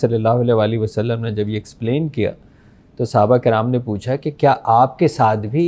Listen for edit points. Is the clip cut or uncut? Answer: uncut